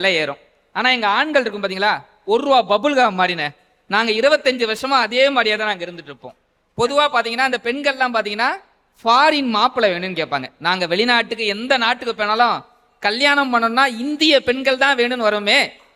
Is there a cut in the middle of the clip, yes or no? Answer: no